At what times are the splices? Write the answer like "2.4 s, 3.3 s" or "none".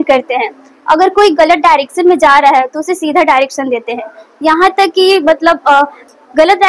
none